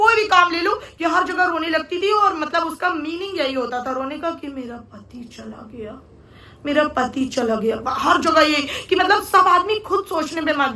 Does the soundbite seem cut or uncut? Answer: uncut